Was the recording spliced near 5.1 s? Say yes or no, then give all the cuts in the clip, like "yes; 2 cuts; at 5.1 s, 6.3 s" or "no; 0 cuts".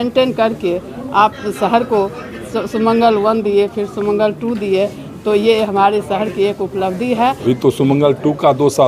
no; 1 cut; at 7.4 s